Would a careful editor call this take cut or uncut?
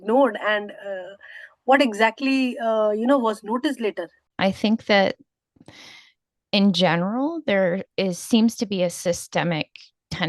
cut